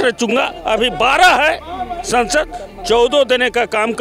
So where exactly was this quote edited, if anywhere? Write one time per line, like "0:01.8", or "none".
none